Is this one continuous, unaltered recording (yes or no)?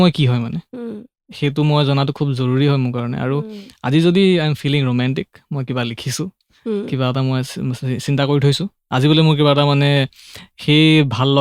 yes